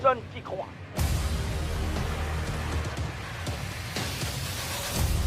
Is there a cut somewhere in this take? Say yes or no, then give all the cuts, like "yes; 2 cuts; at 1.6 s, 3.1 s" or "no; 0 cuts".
yes; 1 cut; at 1.3 s